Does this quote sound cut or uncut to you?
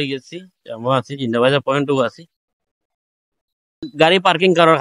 cut